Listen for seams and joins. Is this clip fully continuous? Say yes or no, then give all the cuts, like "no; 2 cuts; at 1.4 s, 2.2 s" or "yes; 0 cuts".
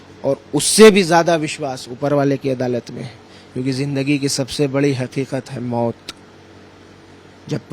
yes; 0 cuts